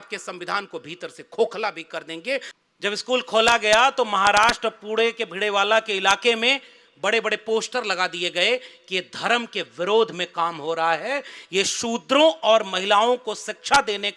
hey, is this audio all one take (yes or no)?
no